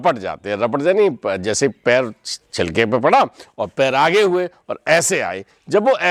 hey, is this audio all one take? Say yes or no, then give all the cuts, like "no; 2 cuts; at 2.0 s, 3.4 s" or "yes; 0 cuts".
yes; 0 cuts